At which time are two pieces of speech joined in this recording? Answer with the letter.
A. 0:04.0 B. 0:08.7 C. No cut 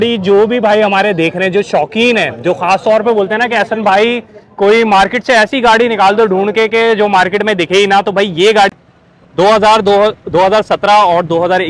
B